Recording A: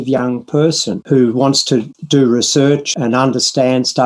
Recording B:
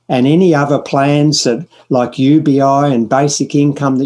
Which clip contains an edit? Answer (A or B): A